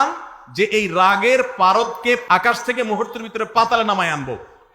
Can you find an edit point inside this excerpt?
yes; 1 cut; at 2.2 s

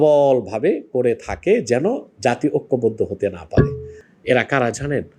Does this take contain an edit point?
yes; 1 cut; at 4.0 s

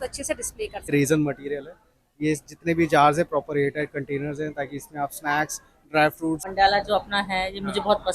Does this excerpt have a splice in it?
yes; 2 cuts; at 0.9 s, 6.5 s

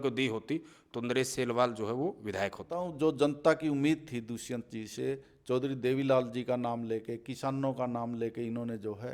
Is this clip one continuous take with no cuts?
no; 1 cut; at 2.8 s

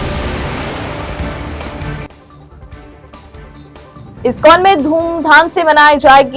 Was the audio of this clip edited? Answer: yes; 1 cut; at 3.7 s

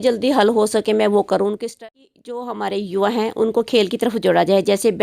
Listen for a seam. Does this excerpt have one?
yes; 1 cut; at 1.7 s

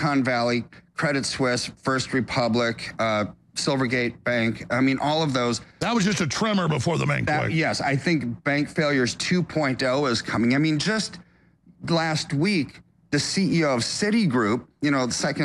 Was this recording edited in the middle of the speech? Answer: no; 0 cuts

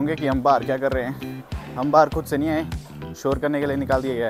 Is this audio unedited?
yes; 0 cuts

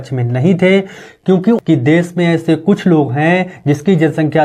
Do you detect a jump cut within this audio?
yes; 1 cut; at 1.6 s

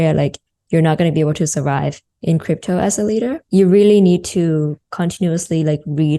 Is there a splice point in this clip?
yes; 1 cut; at 3.4 s

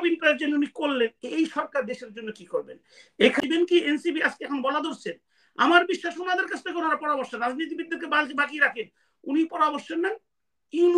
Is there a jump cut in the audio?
yes; 1 cut; at 3.4 s

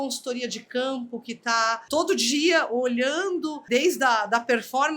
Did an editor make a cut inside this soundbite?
yes; 2 cuts; at 1.8 s, 3.6 s

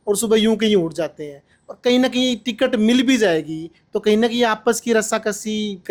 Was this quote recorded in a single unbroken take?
yes; 0 cuts

